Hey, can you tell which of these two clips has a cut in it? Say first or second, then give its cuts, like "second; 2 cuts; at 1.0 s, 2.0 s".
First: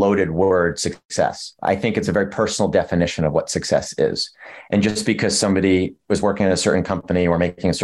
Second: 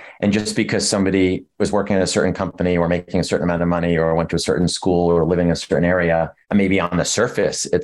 first; 1 cut; at 1.2 s